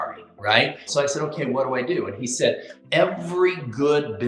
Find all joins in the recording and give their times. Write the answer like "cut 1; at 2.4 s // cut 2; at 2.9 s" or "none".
cut 1; at 0.8 s // cut 2; at 2.7 s